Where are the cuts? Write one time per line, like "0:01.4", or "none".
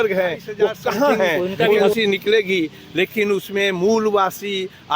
0:01.9